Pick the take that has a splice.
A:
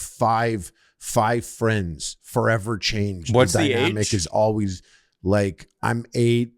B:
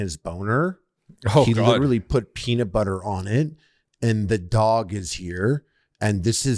A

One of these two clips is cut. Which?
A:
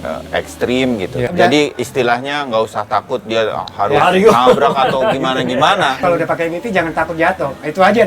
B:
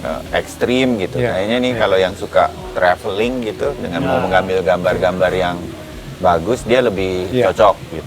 A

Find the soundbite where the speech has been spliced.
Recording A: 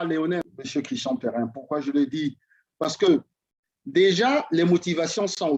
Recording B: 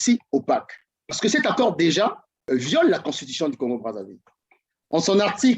B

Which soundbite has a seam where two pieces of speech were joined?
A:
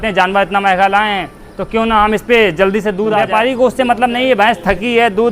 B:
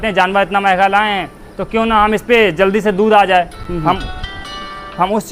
A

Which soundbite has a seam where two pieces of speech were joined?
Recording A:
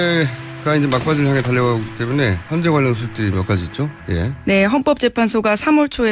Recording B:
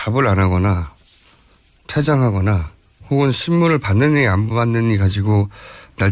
B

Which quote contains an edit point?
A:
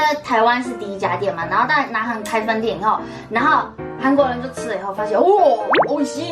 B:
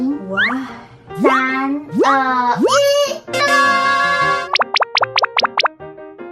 A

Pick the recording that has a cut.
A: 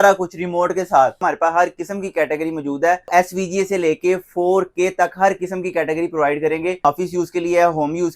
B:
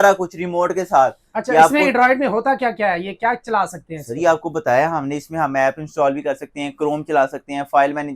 A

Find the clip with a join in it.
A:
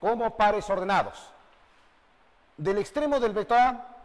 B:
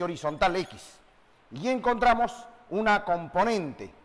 B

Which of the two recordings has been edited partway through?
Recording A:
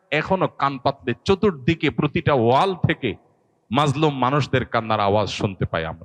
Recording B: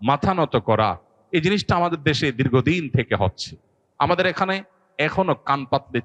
B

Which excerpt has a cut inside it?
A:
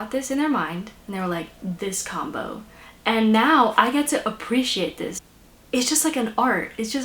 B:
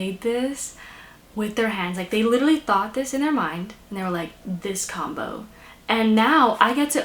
A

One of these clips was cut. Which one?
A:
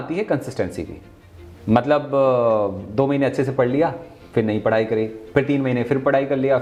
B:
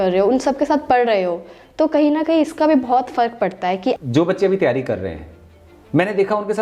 B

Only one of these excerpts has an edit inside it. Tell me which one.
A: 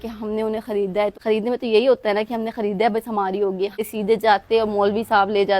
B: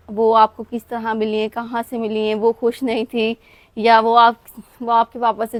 A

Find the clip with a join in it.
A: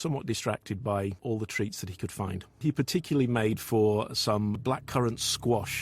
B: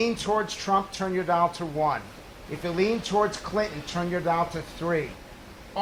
A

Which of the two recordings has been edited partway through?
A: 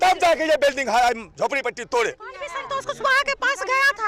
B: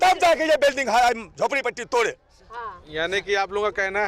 A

